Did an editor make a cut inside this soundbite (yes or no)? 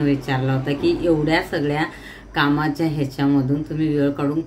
no